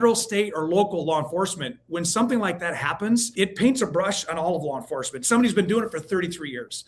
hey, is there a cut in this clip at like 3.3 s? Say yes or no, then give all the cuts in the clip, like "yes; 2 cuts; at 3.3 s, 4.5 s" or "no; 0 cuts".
yes; 1 cut; at 3.3 s